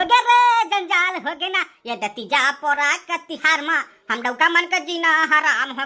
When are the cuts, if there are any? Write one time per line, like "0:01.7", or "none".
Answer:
none